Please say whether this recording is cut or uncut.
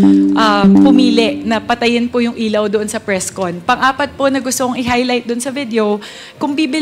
uncut